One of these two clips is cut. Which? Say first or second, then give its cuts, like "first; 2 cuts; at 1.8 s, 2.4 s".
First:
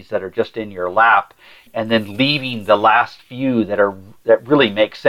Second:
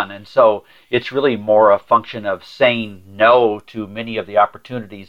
first; 1 cut; at 1.6 s